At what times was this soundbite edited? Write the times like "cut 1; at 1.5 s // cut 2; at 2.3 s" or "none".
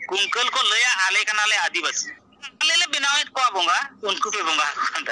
cut 1; at 2.5 s